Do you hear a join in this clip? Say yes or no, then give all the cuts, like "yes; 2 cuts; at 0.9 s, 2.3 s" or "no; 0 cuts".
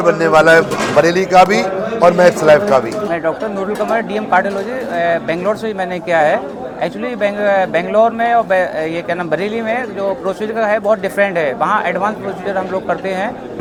no; 0 cuts